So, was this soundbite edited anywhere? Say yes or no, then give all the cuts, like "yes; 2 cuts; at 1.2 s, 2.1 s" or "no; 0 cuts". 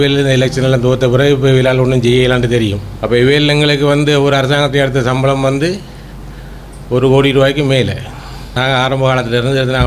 yes; 2 cuts; at 2.9 s, 8.4 s